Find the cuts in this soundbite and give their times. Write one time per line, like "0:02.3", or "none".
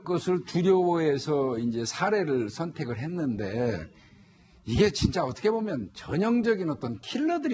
0:02.9